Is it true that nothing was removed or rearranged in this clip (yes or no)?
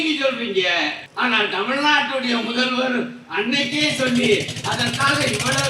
no